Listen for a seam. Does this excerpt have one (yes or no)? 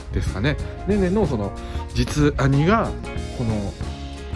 no